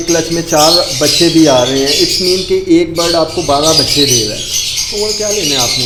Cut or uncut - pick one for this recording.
uncut